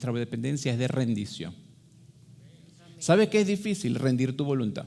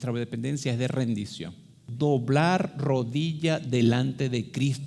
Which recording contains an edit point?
second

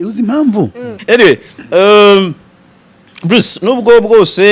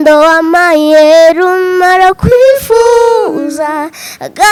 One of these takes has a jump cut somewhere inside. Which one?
first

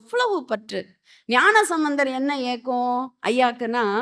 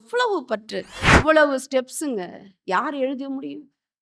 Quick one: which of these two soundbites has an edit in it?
second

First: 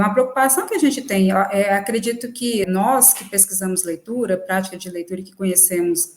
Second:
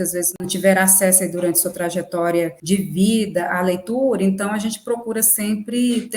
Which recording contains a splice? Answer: first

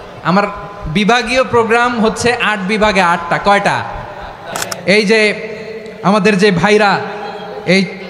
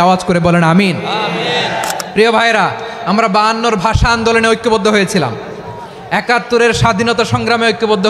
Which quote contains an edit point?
first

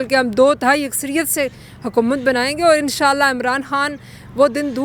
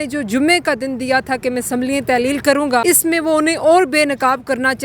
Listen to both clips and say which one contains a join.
second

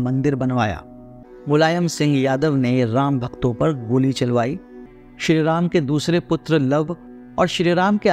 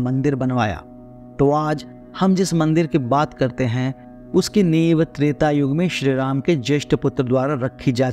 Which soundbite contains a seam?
first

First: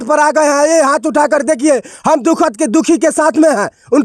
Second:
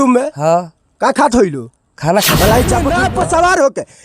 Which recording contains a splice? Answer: second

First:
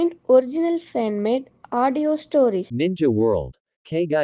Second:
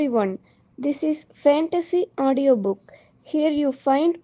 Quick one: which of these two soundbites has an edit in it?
first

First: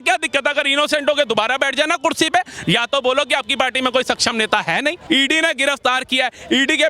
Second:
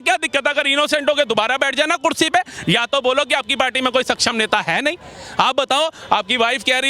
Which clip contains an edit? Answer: first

